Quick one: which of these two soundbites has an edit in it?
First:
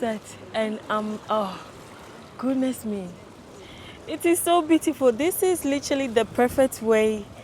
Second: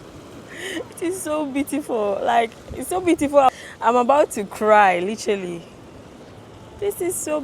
second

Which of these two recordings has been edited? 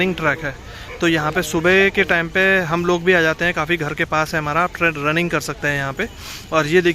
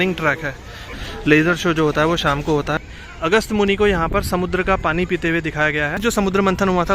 second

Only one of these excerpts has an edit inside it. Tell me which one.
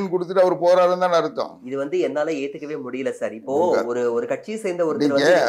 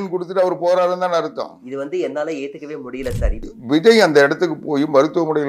second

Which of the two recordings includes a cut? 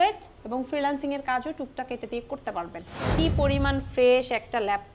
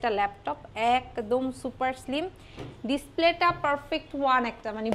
first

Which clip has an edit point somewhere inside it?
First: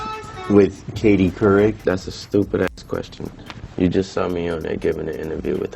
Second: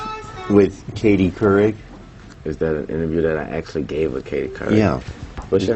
first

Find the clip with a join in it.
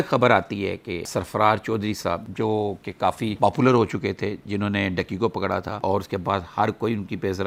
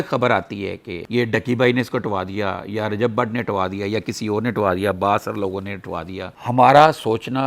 second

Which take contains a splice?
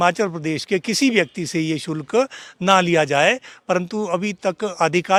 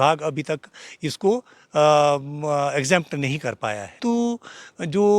second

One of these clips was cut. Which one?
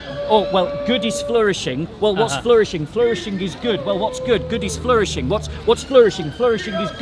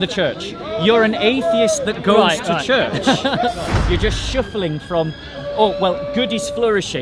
second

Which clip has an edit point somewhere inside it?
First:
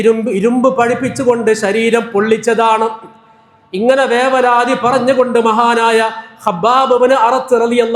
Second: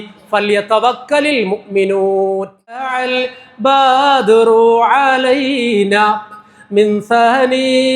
second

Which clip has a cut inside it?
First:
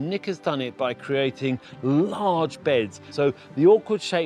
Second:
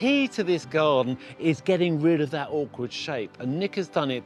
first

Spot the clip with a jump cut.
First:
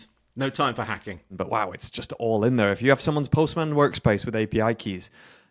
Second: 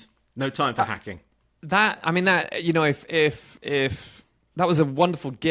first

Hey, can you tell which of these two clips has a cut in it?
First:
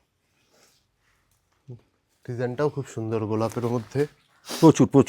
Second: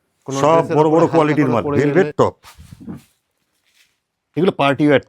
second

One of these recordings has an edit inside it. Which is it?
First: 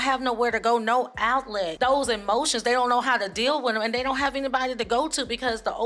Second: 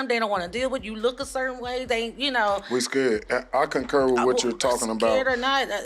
first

